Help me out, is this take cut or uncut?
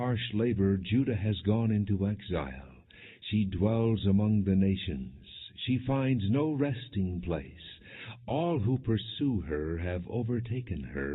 uncut